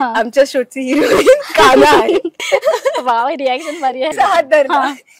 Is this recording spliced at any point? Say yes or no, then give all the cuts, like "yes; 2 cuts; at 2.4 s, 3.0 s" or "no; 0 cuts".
yes; 2 cuts; at 2.3 s, 4.1 s